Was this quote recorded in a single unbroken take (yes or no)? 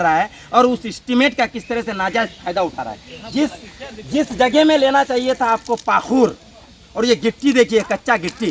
yes